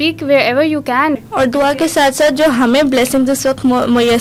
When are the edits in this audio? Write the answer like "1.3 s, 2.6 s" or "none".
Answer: none